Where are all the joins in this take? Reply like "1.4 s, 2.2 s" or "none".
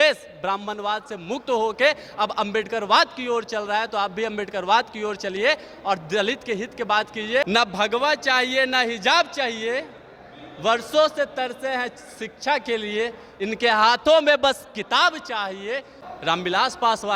7.4 s, 16.0 s